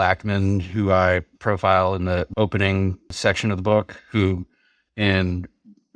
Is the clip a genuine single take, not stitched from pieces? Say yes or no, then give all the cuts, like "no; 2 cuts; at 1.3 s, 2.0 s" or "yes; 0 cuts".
no; 3 cuts; at 1.3 s, 2.3 s, 3.2 s